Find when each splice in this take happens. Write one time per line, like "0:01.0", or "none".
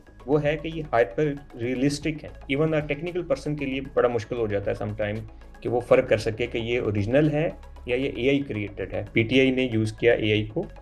0:02.3
0:09.1